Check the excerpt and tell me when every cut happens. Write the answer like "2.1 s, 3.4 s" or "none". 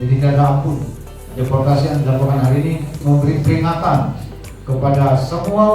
1.2 s, 2.9 s